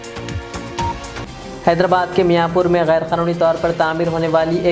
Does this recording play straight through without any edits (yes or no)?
no